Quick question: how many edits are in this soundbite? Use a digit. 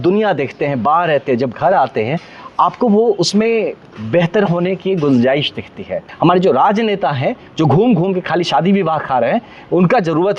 1